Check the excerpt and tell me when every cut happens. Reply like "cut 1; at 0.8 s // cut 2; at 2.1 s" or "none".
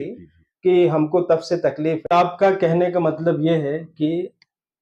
cut 1; at 2.1 s